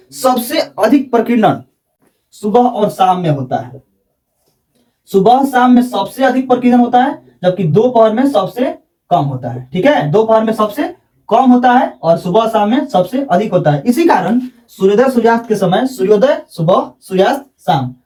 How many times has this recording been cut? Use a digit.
0